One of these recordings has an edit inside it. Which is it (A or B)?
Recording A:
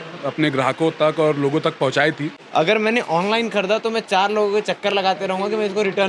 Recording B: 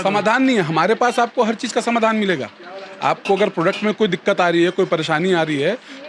A